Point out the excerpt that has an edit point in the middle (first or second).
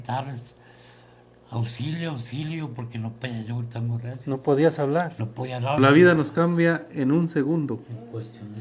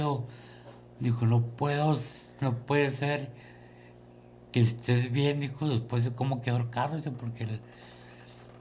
first